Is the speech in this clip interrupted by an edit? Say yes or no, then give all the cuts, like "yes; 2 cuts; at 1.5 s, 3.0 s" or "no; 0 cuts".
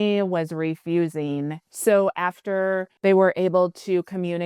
yes; 2 cuts; at 1.7 s, 2.9 s